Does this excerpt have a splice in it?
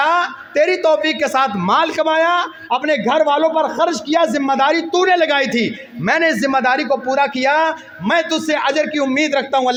no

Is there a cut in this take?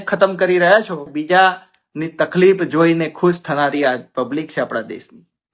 yes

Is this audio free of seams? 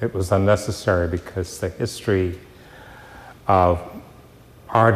no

